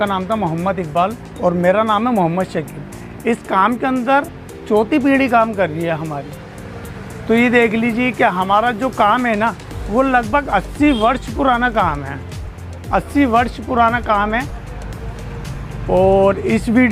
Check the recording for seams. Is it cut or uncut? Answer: uncut